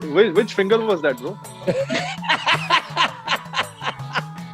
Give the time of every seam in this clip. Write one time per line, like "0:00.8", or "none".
0:01.3